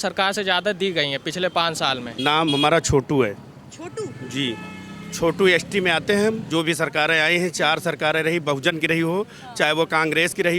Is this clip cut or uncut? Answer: cut